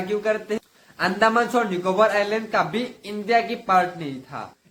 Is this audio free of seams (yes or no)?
yes